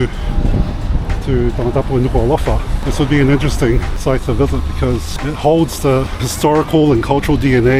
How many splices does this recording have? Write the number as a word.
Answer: four